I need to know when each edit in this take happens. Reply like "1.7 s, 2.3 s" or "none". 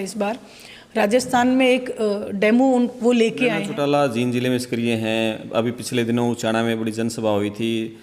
3.7 s

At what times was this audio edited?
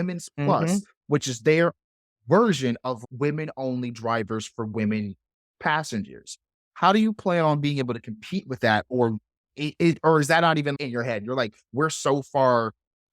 3.0 s, 10.7 s

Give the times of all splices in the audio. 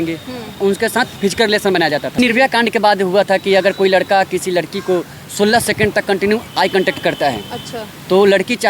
1.1 s, 2.2 s

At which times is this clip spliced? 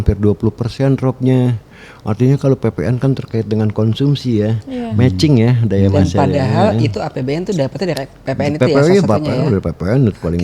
none

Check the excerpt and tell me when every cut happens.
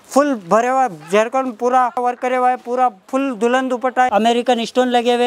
2.0 s, 4.1 s

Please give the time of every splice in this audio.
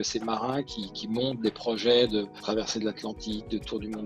2.4 s

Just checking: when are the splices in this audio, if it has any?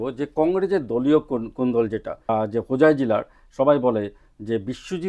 2.3 s

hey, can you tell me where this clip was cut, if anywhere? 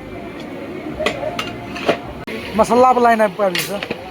2.3 s

